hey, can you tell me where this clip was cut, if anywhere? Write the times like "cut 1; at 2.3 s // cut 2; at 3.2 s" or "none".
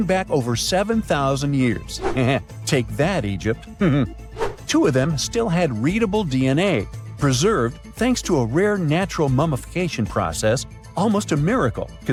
none